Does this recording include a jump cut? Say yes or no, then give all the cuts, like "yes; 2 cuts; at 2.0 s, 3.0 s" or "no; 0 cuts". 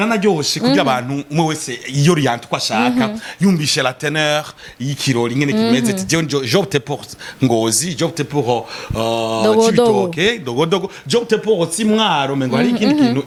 no; 0 cuts